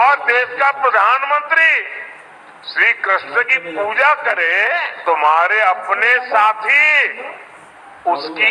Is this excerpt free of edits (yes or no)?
no